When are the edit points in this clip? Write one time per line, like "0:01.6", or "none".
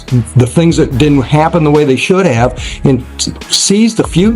none